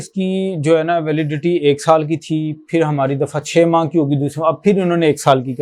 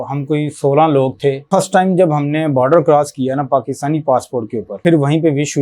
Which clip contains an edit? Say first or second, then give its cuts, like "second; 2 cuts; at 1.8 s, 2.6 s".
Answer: second; 2 cuts; at 1.5 s, 4.8 s